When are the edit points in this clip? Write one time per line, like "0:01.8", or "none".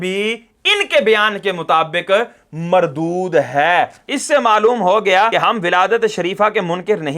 0:04.1